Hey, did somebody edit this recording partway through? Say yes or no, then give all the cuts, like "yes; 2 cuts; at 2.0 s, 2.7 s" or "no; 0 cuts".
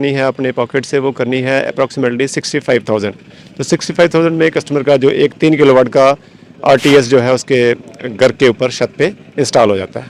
no; 0 cuts